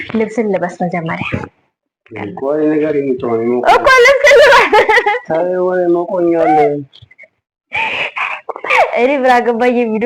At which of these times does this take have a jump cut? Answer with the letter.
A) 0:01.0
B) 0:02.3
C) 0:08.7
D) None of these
C